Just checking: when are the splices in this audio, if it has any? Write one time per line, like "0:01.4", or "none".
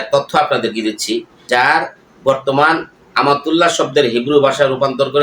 0:01.3